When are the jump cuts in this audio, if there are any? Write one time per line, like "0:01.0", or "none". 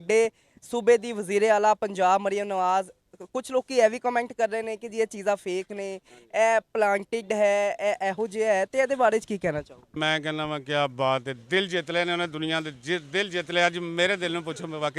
0:09.9

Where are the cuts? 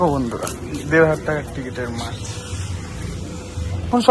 none

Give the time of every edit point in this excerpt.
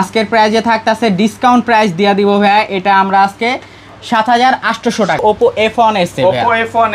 0:05.2

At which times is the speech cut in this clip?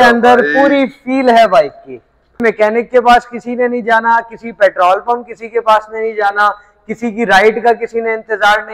0:02.5

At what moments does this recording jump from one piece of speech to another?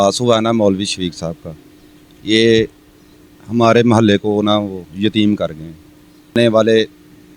0:06.4

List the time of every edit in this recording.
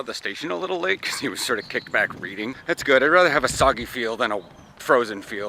0:02.6

